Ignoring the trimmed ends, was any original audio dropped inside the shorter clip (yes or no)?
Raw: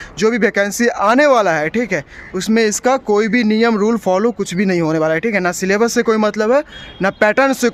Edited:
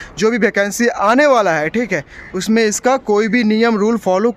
no